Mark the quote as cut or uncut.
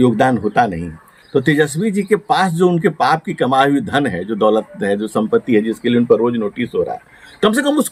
uncut